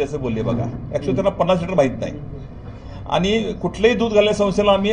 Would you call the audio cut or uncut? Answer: uncut